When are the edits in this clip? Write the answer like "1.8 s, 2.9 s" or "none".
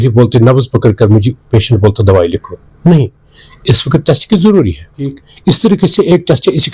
5.3 s